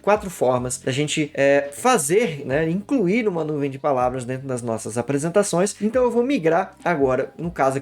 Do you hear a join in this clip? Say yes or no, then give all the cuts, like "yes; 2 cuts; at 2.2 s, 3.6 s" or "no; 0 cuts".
no; 0 cuts